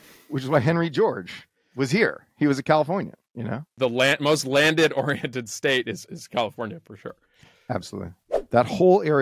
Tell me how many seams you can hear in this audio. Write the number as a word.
two